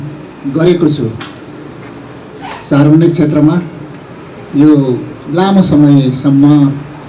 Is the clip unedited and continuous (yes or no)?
yes